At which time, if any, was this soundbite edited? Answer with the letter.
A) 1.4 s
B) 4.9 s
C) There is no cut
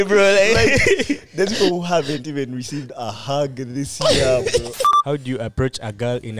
B